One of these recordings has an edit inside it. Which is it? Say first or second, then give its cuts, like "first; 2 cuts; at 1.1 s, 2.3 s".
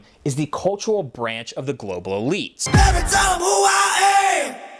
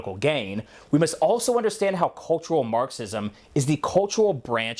first; 1 cut; at 2.6 s